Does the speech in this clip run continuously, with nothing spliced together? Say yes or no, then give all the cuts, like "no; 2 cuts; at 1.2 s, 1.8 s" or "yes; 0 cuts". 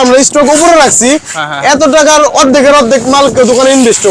yes; 0 cuts